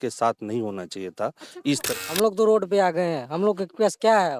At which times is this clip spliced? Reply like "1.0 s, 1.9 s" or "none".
1.9 s

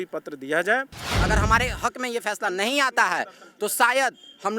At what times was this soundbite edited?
1.1 s

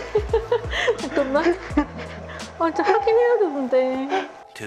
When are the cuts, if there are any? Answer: none

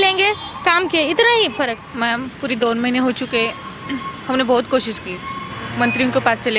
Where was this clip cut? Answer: 1.9 s

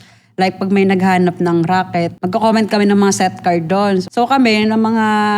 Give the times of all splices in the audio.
2.2 s, 4.1 s

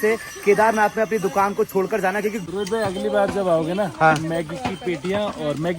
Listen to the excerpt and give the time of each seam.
2.4 s

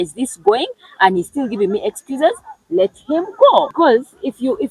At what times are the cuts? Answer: 3.7 s

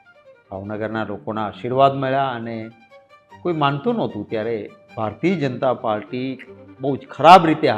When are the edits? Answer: none

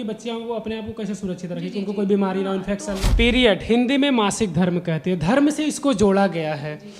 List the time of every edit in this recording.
3.0 s

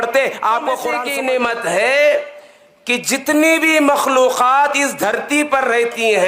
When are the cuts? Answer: 1.0 s

